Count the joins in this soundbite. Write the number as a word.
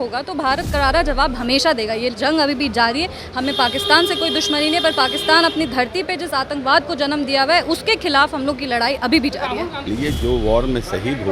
one